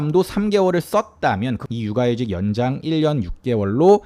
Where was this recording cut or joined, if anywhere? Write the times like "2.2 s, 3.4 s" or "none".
1.6 s